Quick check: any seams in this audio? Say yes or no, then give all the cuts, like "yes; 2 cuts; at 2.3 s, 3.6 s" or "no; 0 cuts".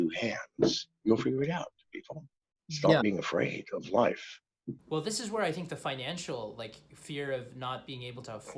no; 0 cuts